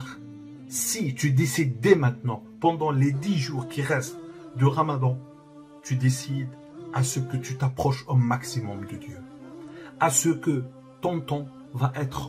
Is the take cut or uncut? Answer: uncut